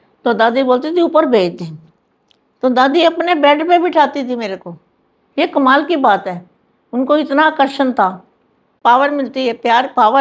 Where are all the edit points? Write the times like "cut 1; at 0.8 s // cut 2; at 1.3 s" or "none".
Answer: cut 1; at 8.7 s